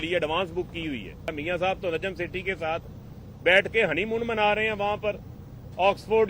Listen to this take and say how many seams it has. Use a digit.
1